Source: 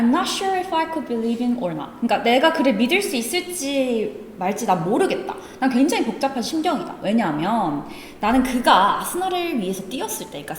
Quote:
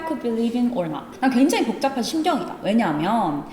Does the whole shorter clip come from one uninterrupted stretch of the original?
no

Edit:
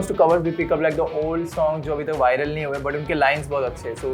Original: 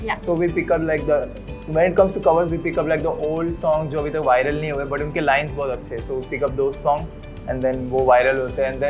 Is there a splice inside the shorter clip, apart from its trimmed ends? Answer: no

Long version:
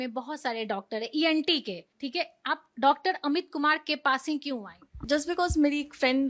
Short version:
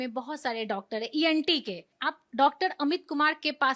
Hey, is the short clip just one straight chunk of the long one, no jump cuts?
no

